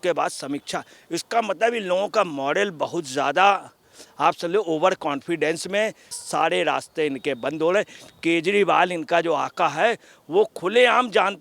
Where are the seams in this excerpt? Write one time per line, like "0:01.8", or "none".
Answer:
0:06.2